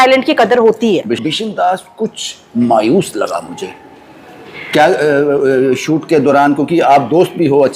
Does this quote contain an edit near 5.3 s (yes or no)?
no